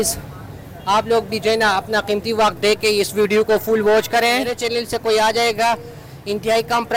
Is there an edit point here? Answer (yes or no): yes